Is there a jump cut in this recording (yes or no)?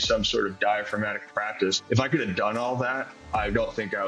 yes